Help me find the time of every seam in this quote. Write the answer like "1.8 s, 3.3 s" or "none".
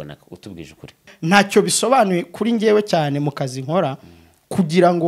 1.1 s